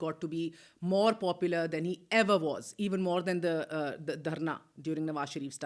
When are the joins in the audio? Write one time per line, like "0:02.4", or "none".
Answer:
none